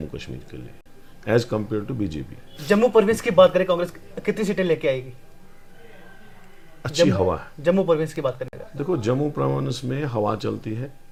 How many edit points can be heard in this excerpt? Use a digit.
0